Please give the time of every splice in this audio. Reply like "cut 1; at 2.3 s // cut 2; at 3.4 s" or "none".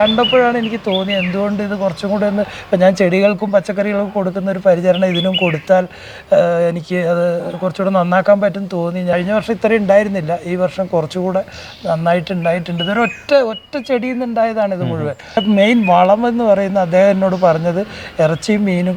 cut 1; at 9.1 s // cut 2; at 15.4 s

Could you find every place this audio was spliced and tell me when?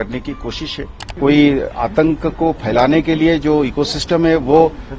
cut 1; at 1.2 s

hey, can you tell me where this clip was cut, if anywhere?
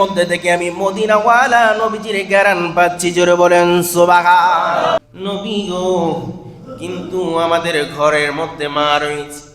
cut 1; at 5.0 s

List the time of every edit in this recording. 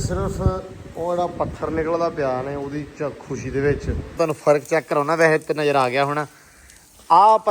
cut 1; at 4.2 s

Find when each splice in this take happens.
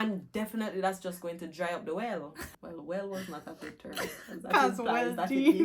cut 1; at 2.4 s

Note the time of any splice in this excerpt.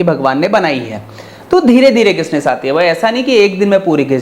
none

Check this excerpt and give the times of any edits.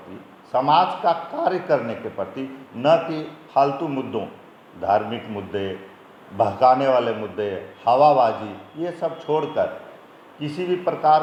none

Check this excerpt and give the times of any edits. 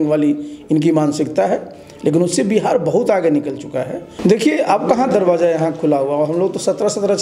cut 1; at 4.1 s

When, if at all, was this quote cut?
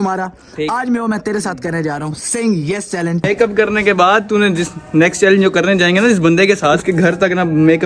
cut 1; at 3.3 s // cut 2; at 6.8 s

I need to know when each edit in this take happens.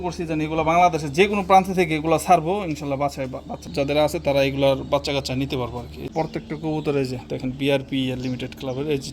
cut 1; at 3.6 s // cut 2; at 6.0 s

